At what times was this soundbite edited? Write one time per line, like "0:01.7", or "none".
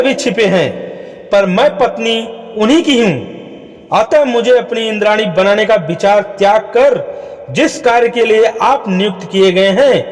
none